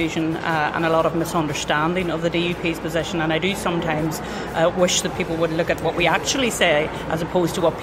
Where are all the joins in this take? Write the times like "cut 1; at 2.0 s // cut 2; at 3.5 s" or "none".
none